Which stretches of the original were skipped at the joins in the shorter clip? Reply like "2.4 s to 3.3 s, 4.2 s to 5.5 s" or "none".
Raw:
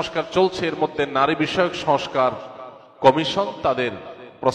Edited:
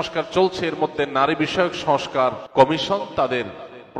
2.4 s to 2.9 s